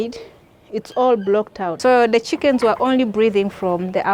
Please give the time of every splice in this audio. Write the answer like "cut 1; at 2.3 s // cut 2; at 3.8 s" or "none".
cut 1; at 1.7 s